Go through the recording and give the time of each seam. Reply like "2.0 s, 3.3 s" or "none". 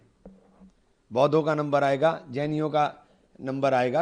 none